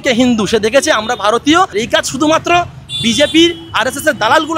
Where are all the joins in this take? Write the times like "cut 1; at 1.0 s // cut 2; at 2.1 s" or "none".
cut 1; at 1.7 s

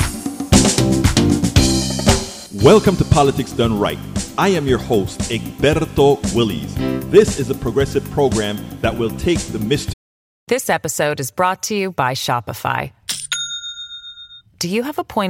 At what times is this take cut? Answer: cut 1; at 9.9 s

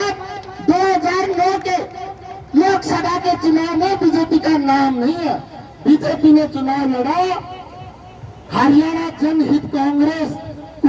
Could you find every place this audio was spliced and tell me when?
cut 1; at 5.5 s

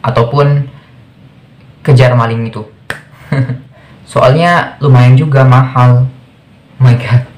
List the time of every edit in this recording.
cut 1; at 3.7 s

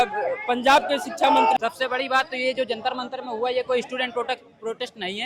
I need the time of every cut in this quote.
cut 1; at 1.6 s

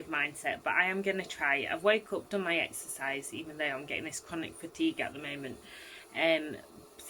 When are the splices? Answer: none

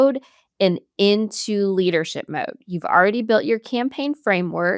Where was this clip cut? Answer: none

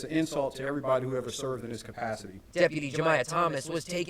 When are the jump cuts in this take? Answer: cut 1; at 2.8 s

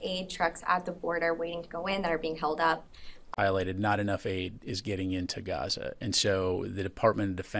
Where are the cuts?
none

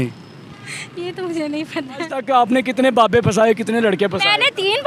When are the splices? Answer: cut 1; at 2.2 s

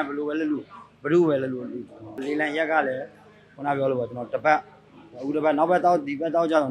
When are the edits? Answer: cut 1; at 2.2 s

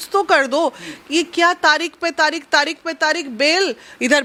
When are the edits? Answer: none

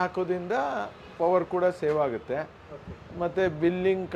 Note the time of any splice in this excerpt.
none

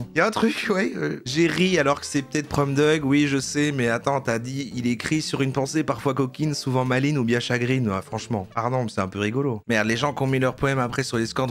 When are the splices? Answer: cut 1; at 9.6 s

